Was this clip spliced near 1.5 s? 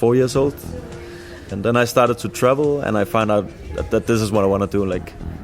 yes; 2 cuts; at 1.5 s, 3.1 s

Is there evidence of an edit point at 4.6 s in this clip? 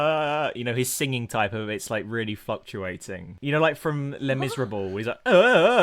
no; 1 cut; at 3.3 s

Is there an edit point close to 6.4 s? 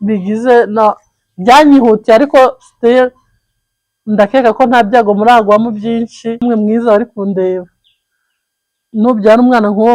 yes; 1 cut; at 6.4 s

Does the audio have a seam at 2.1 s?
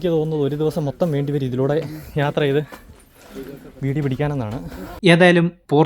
no; 1 cut; at 4.9 s

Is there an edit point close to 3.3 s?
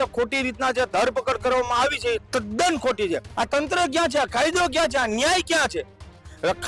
yes; 1 cut; at 3.3 s

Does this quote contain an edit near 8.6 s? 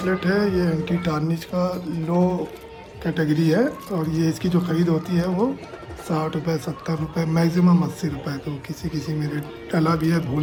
no; 0 cuts

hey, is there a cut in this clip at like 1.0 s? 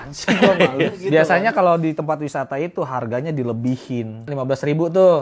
yes; 2 cuts; at 1.0 s, 4.3 s

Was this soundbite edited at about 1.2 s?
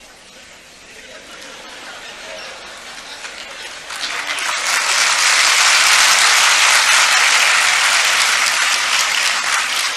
no; 0 cuts

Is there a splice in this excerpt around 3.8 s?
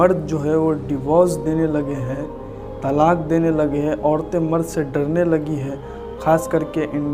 no; 0 cuts

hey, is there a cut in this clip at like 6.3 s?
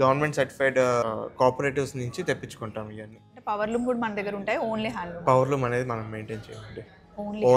no; 2 cuts; at 1.1 s, 3.3 s

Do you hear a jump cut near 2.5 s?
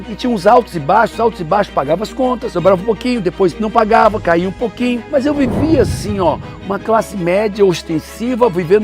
yes; 1 cut; at 2.5 s

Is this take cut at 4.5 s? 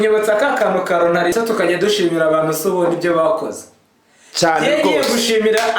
no; 1 cut; at 1.3 s

